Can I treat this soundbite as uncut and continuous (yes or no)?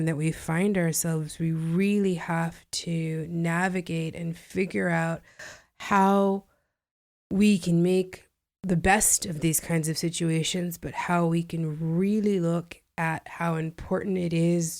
yes